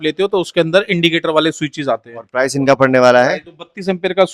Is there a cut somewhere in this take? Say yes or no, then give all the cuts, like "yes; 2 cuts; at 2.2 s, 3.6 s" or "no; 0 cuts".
no; 0 cuts